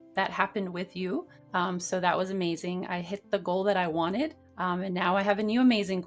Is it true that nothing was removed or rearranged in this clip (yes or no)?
no